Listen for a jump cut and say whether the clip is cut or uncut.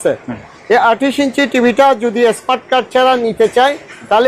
uncut